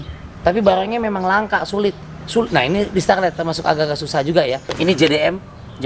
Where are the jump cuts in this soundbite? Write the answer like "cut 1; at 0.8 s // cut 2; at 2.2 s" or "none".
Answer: cut 1; at 4.7 s